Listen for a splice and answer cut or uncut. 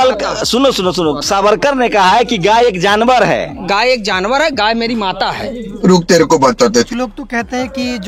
uncut